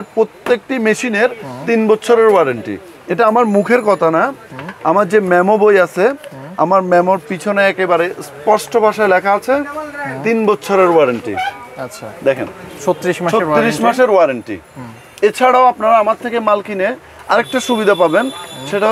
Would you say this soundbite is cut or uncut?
uncut